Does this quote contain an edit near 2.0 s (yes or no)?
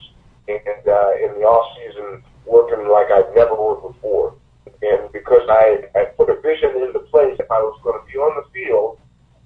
no